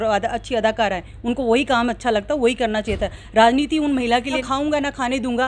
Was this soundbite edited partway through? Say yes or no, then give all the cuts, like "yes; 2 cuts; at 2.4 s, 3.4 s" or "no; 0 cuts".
yes; 1 cut; at 4.4 s